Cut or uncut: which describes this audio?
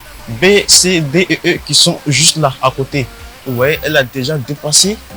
uncut